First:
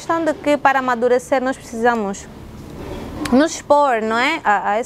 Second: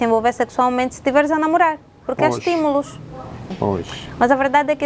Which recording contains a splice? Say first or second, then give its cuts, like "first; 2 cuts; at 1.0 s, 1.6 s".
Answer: second; 1 cut; at 3.4 s